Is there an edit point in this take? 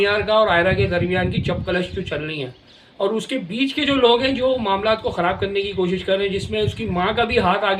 no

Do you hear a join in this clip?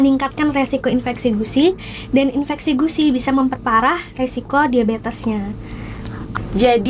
no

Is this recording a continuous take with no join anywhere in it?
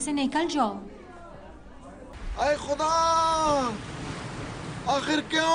no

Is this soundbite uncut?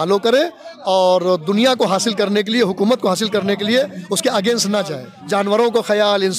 no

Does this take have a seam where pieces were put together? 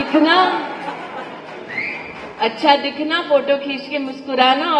no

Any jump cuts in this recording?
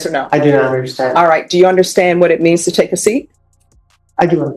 no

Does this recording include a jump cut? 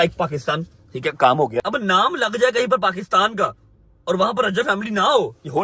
yes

